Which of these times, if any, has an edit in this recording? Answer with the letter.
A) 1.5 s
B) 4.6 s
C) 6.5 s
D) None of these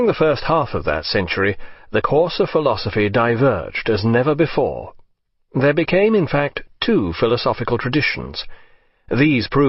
D